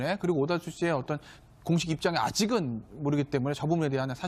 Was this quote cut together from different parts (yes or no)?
yes